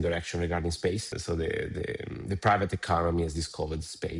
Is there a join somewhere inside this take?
yes; 1 cut; at 1.1 s

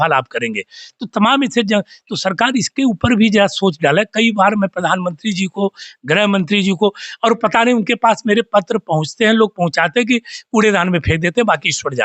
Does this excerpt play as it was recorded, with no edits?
yes; 0 cuts

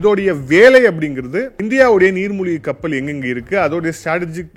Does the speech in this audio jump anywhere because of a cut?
no; 0 cuts

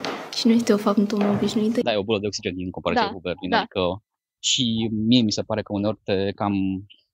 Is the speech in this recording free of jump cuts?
no; 1 cut; at 1.8 s

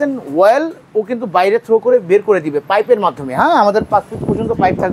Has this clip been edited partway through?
no; 0 cuts

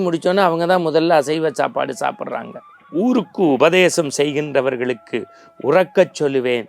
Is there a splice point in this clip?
yes; 1 cut; at 2.8 s

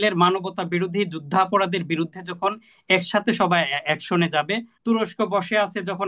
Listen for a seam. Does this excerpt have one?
yes; 1 cut; at 4.7 s

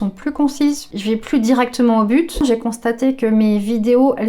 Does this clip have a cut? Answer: yes; 1 cut; at 2.4 s

